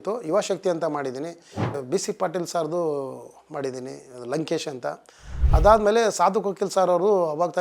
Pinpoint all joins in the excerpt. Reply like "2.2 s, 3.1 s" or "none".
1.7 s